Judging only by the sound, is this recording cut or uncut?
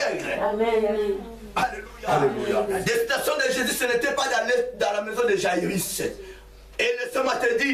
cut